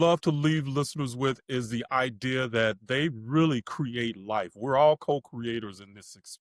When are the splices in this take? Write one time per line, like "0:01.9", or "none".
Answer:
none